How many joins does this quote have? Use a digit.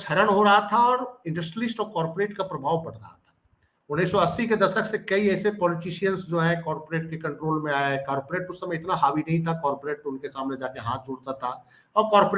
0